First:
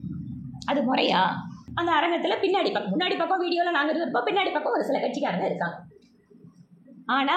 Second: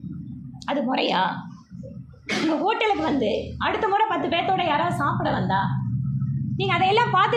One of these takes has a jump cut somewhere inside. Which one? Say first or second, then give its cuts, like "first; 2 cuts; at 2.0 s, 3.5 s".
first; 1 cut; at 1.6 s